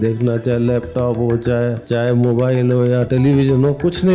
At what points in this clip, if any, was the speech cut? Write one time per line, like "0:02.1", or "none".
0:01.8
0:03.1